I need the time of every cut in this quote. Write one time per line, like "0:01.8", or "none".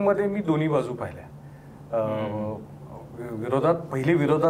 none